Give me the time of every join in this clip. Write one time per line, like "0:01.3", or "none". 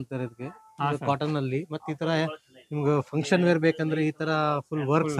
none